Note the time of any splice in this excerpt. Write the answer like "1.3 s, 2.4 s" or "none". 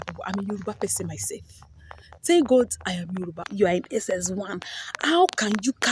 3.5 s